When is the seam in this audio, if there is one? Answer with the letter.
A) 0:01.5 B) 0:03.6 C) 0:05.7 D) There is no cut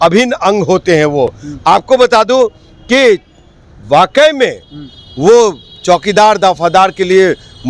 D